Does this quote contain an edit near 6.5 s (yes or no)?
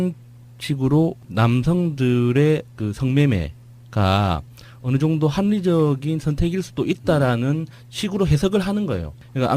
no